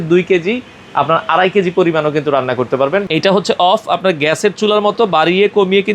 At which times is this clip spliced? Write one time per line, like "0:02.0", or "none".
0:03.0